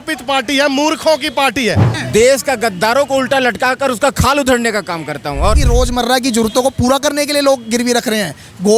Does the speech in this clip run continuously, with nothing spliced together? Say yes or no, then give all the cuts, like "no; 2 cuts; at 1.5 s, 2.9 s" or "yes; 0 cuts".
no; 2 cuts; at 1.9 s, 5.6 s